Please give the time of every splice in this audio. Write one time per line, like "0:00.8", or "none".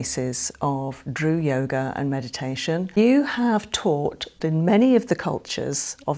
0:03.0
0:04.3